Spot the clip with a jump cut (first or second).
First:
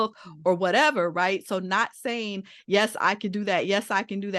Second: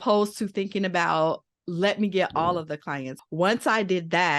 second